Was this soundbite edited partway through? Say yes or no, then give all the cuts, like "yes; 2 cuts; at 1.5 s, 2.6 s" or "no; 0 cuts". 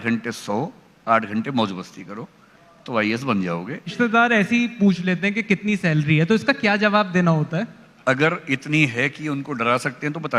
yes; 2 cuts; at 3.9 s, 7.8 s